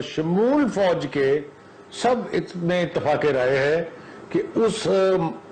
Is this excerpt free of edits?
yes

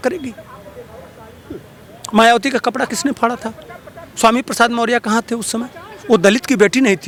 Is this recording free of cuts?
yes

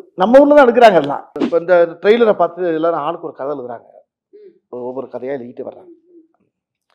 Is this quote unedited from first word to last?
no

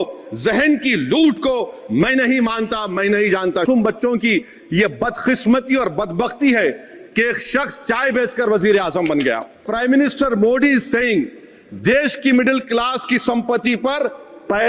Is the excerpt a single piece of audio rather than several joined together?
no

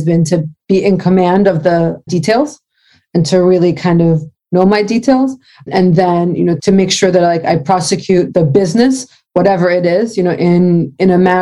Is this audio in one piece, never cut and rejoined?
no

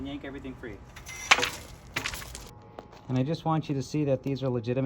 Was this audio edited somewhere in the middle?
yes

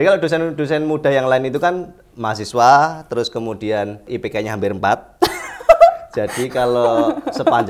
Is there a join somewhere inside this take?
yes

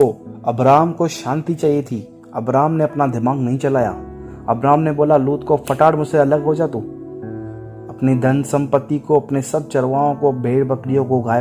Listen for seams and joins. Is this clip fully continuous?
yes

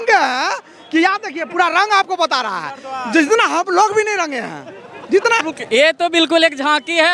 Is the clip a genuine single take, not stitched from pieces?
no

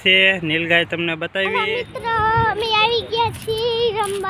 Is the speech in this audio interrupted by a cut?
yes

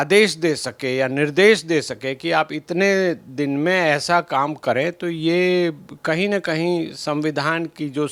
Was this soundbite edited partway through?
no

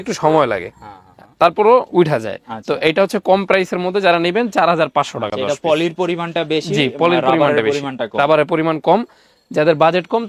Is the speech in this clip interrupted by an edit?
no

